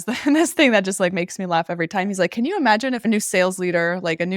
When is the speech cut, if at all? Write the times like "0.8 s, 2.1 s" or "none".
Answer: 3.0 s